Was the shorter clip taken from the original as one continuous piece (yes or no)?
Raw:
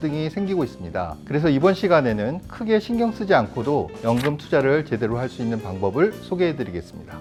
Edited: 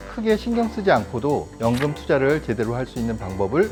yes